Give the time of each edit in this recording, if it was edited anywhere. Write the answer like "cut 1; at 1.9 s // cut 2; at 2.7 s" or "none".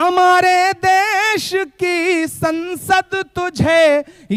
none